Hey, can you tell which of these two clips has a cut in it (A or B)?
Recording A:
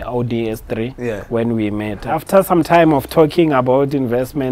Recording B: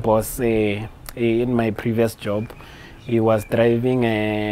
A